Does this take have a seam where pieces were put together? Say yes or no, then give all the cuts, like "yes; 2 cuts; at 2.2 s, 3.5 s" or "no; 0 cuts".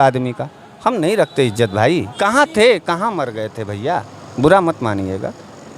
yes; 1 cut; at 2.1 s